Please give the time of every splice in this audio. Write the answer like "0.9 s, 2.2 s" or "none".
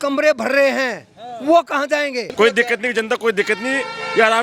2.3 s